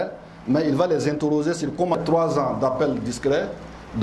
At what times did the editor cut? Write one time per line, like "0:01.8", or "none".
0:02.0